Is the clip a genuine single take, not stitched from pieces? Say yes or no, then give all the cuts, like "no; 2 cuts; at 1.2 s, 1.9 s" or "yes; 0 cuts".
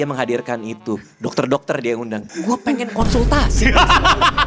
no; 1 cut; at 2.3 s